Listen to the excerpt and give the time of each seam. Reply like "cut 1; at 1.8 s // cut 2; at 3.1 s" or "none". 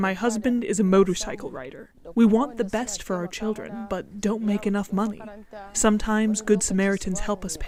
none

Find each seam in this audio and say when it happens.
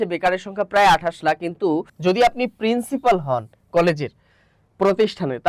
cut 1; at 1.9 s

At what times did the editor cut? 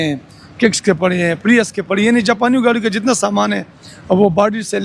none

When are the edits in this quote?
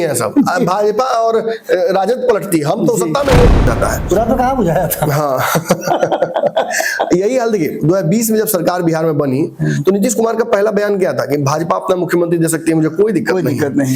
cut 1; at 3.6 s

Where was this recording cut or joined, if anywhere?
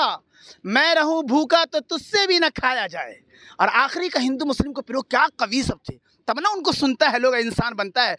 none

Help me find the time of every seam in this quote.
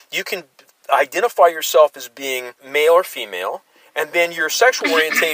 cut 1; at 2.6 s

